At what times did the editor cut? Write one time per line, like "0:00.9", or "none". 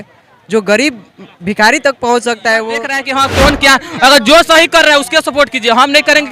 0:03.0